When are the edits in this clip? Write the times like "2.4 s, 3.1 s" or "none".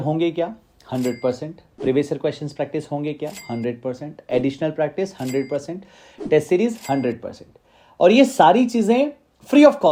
none